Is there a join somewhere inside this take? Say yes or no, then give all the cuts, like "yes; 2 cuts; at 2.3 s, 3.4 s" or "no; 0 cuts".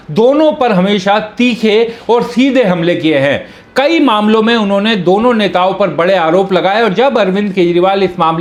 no; 0 cuts